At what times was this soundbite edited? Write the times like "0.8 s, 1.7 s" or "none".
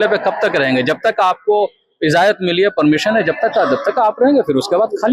none